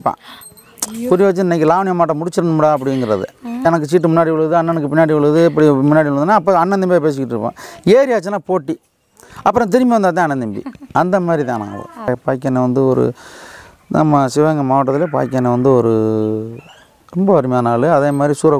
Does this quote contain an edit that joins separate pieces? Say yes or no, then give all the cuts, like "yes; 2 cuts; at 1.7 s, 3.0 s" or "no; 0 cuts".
yes; 2 cuts; at 3.6 s, 12.2 s